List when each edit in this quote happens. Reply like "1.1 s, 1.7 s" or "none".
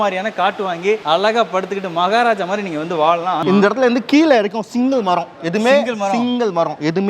1.0 s, 3.4 s

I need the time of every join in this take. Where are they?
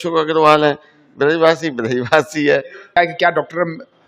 3.0 s

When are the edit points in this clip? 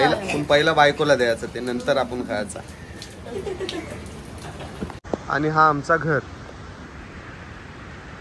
5.0 s

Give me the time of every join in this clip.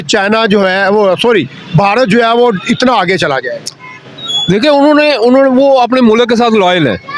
none

